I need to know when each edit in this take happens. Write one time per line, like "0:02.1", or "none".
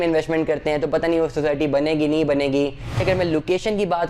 0:03.0